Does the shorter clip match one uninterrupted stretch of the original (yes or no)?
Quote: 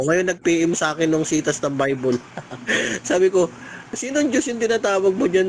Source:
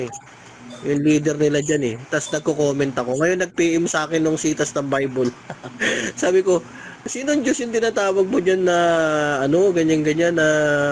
yes